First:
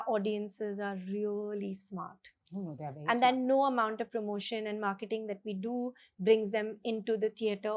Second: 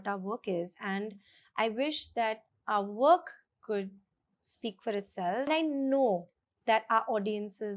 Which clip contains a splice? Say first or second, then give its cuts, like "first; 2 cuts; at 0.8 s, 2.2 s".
second; 1 cut; at 5.5 s